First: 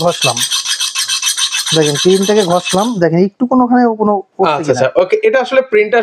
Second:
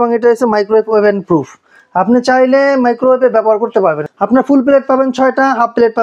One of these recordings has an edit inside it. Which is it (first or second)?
second